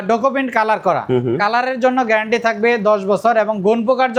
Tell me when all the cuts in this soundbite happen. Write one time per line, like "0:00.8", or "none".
none